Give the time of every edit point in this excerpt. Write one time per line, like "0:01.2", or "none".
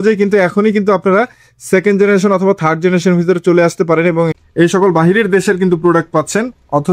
0:04.4